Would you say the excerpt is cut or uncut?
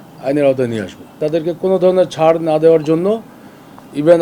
cut